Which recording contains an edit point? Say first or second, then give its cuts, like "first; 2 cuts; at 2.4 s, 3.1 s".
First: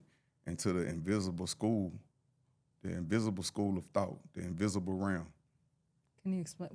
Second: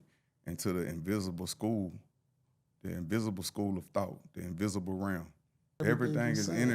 second; 1 cut; at 5.8 s